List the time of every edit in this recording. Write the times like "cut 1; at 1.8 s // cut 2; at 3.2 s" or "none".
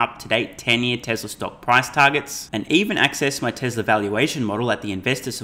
none